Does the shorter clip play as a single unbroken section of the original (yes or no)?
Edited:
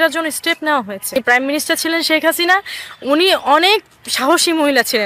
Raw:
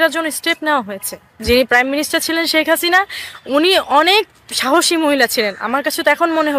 no